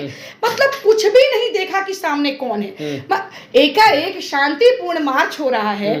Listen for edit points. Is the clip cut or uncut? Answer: uncut